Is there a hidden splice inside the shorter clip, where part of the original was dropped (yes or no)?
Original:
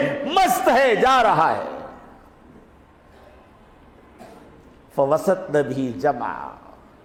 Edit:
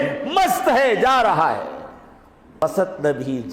yes